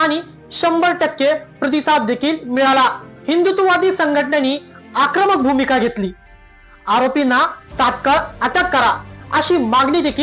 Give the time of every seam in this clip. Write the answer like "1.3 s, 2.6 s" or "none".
none